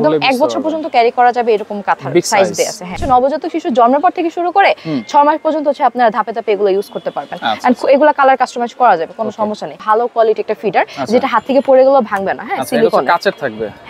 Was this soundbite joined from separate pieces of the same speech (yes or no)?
yes